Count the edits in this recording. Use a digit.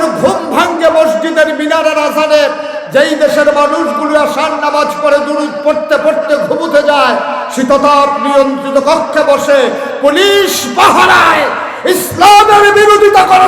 0